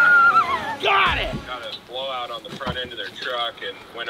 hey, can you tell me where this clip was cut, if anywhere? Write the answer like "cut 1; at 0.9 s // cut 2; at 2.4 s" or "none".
cut 1; at 1.4 s